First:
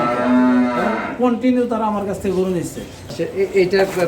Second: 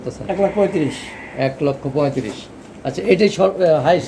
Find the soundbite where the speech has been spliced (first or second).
first